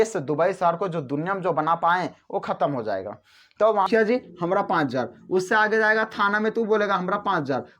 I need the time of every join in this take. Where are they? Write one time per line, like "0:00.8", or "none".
0:03.9